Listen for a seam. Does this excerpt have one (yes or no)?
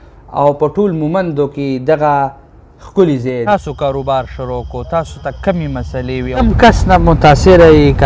yes